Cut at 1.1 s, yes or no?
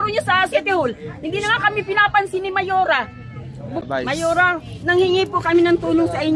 no